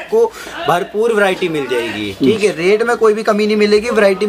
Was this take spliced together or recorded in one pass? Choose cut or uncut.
uncut